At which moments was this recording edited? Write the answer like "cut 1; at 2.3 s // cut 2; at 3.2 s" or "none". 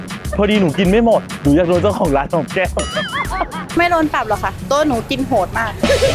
cut 1; at 3.8 s